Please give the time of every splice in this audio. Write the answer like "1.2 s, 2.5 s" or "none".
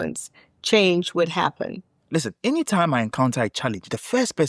1.9 s